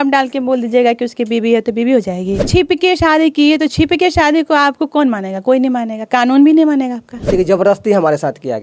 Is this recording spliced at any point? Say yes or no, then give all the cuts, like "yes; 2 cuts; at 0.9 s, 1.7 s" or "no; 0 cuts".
yes; 2 cuts; at 2.5 s, 7.3 s